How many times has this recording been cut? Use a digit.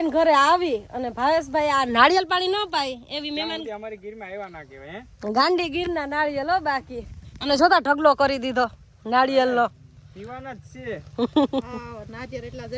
0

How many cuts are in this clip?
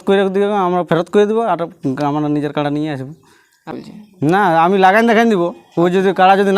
1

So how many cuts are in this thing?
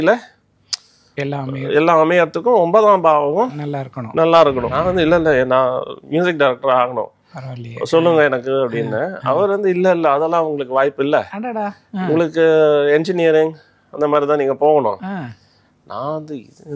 1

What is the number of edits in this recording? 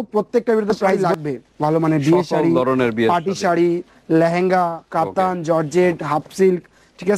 1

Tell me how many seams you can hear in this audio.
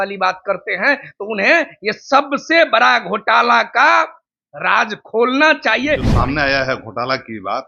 1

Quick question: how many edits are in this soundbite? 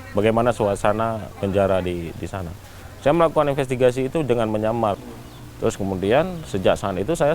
1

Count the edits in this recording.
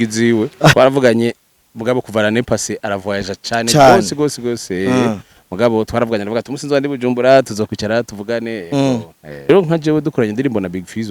2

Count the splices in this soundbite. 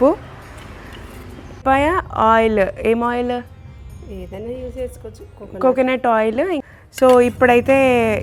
0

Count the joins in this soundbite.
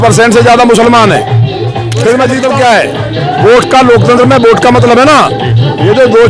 1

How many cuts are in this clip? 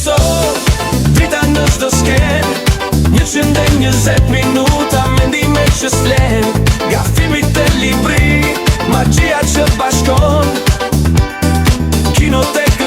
0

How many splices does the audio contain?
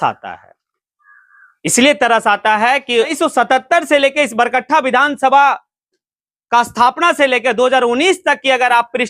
1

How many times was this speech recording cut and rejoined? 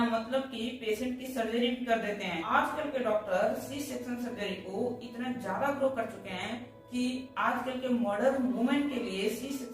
1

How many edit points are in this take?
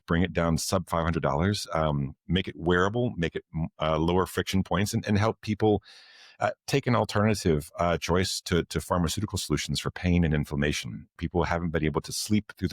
1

